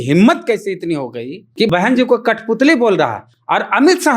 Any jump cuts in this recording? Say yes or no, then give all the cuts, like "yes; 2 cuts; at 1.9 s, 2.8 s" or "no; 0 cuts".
yes; 1 cut; at 1.7 s